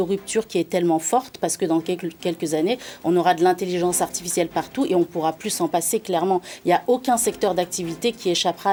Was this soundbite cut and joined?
no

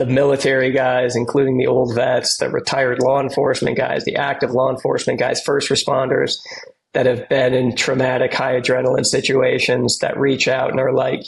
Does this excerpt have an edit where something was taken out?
no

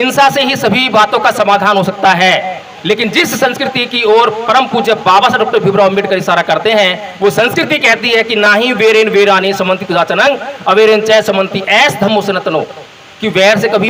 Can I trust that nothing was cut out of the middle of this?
yes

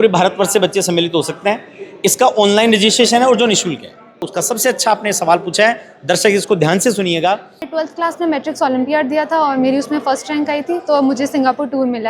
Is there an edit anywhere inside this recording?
yes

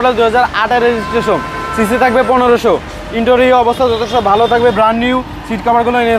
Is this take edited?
no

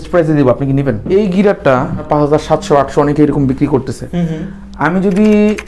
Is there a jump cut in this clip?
yes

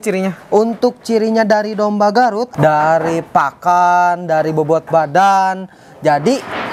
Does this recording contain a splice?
yes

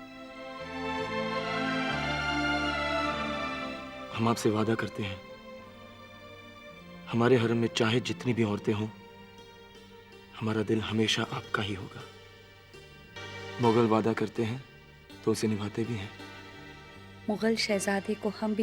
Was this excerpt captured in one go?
no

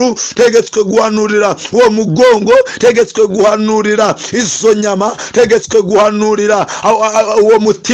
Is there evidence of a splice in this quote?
no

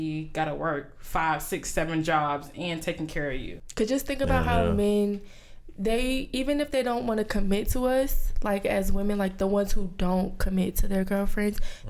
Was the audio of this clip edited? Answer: yes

